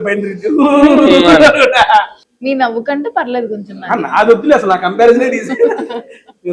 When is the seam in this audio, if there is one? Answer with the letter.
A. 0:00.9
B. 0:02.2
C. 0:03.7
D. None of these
B